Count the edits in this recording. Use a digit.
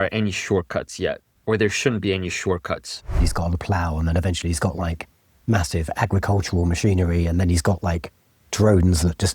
2